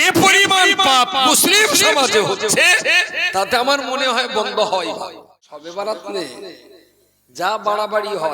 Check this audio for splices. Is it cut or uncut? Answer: cut